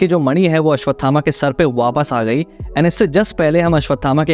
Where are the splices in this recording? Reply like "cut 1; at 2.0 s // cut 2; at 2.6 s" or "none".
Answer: none